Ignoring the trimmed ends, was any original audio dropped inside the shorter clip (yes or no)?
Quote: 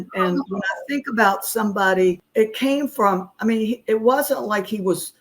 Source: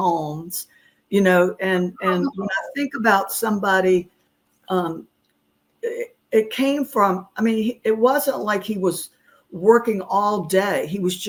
yes